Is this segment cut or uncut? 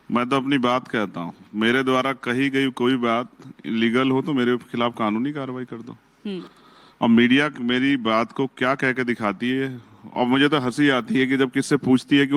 uncut